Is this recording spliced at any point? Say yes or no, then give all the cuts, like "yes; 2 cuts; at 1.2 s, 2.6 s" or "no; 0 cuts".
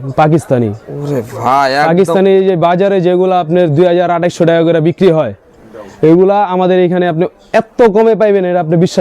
no; 0 cuts